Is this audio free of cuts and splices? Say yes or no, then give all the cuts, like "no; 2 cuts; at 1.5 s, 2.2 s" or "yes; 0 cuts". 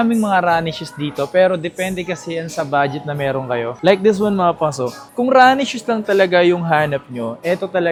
yes; 0 cuts